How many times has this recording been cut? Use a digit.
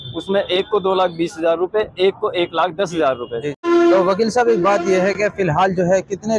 1